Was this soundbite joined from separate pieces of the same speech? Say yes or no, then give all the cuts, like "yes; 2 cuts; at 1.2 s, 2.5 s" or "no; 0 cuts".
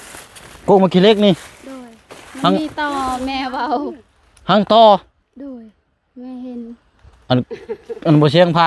no; 0 cuts